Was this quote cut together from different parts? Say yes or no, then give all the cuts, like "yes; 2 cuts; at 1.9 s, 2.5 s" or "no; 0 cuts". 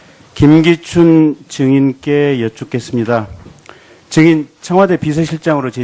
no; 0 cuts